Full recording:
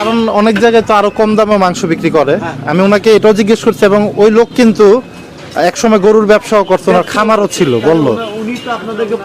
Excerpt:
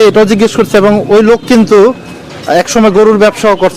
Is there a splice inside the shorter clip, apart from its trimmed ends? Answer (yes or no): no